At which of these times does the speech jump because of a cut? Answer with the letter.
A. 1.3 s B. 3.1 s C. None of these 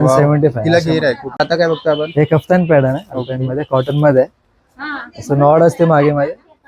A